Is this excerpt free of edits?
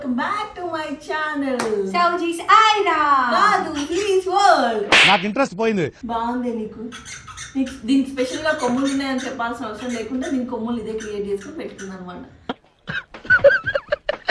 yes; 0 cuts

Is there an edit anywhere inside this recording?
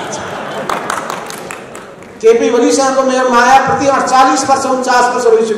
no; 0 cuts

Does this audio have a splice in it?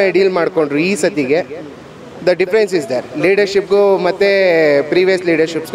no; 0 cuts

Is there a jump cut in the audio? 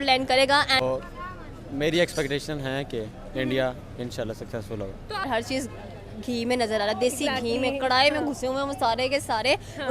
yes; 2 cuts; at 0.8 s, 5.3 s

